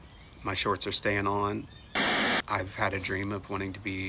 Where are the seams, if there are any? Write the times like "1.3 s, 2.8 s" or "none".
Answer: 2.2 s

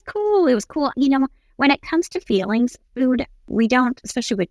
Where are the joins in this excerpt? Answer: 0.9 s, 3.5 s

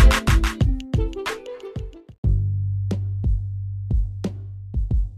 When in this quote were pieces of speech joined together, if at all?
2.0 s

